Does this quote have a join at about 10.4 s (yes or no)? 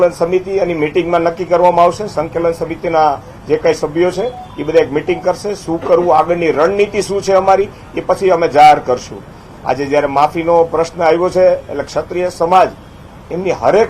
yes